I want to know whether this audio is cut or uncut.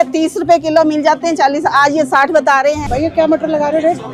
cut